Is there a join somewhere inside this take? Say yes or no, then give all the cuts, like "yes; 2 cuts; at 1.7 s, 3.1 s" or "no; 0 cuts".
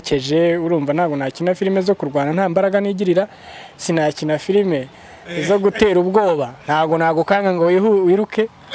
no; 0 cuts